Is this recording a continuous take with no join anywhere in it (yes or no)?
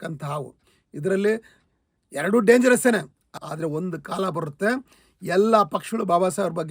no